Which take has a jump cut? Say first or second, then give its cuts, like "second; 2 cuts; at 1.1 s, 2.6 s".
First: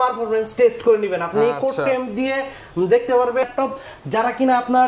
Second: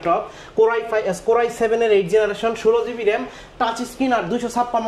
first; 1 cut; at 3.5 s